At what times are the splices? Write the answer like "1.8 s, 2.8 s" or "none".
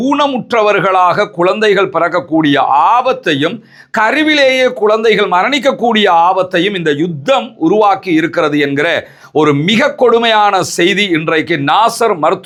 none